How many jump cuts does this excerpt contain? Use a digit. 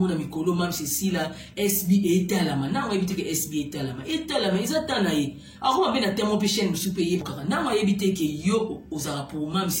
1